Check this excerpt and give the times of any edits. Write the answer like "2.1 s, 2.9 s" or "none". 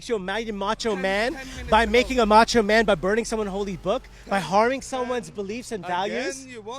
none